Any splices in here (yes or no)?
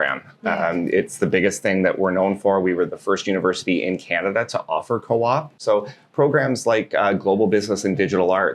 yes